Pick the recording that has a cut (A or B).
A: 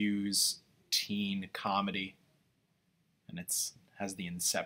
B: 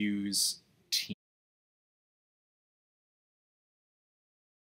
A